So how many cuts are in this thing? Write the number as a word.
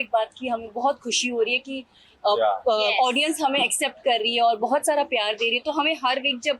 zero